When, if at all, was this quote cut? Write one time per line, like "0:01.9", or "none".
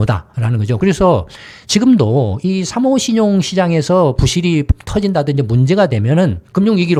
none